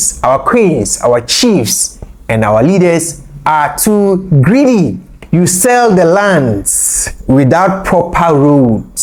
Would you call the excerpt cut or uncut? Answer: uncut